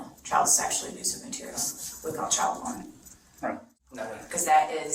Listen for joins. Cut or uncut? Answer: cut